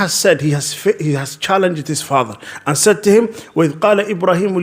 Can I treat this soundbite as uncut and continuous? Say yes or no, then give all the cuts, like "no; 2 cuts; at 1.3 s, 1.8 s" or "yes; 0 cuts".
yes; 0 cuts